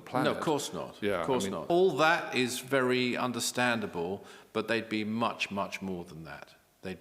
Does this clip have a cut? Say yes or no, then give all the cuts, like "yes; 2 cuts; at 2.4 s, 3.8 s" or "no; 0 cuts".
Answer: yes; 1 cut; at 1.7 s